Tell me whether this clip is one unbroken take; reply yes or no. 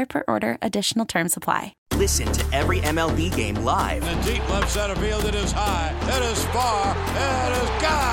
no